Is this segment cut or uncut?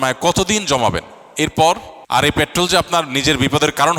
uncut